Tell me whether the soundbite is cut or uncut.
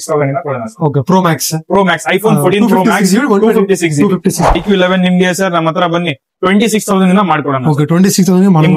cut